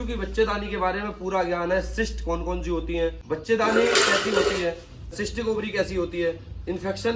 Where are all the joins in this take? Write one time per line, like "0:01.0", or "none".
0:03.2
0:05.2

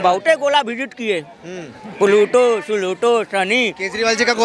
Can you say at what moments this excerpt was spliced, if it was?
none

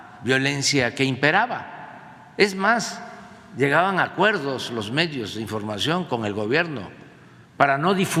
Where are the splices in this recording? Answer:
none

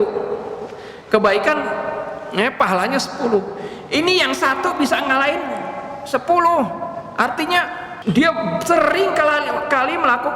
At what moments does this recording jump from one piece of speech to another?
0:07.9

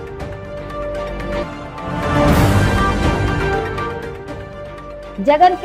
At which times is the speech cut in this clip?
none

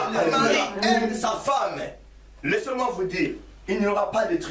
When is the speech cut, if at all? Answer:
0:01.2

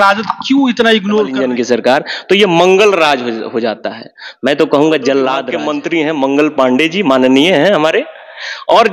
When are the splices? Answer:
0:01.4
0:05.5

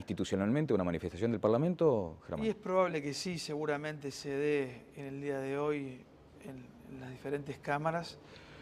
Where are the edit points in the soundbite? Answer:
0:03.6

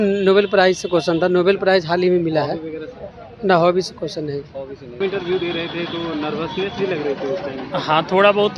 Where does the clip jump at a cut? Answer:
0:05.0

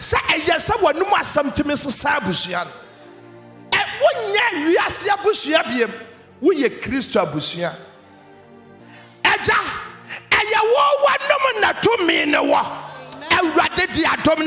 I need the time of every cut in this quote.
0:08.7

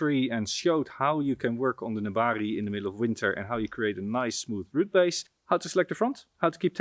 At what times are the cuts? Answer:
0:05.3

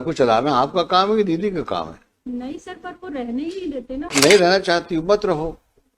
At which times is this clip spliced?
0:04.1

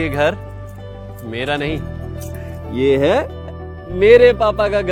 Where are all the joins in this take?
none

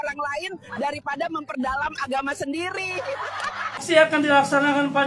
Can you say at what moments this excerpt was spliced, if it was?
0:03.8

